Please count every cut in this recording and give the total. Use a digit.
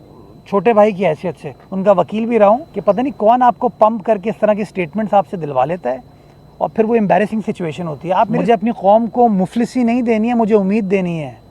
2